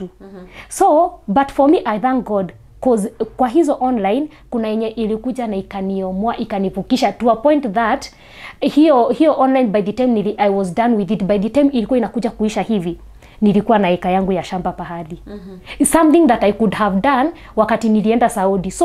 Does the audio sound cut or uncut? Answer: uncut